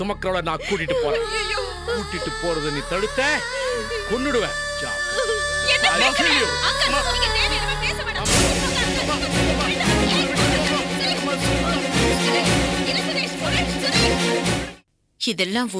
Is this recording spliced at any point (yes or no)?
yes